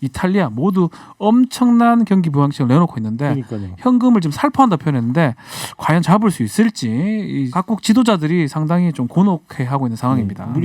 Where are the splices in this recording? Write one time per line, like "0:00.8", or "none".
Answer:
0:07.5

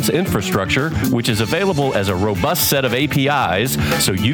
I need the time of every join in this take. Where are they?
none

